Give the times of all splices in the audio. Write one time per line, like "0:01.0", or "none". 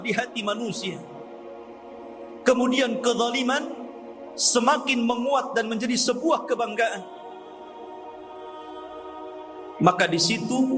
none